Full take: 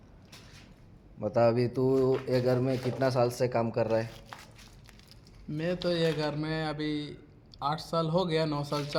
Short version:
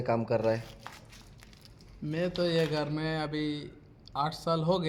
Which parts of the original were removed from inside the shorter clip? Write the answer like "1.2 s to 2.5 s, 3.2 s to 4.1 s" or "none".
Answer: none